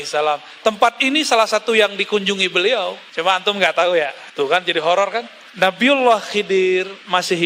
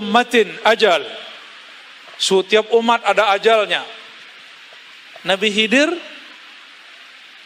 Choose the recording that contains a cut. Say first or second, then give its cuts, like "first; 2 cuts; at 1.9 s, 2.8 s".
first; 3 cuts; at 3.0 s, 4.2 s, 5.4 s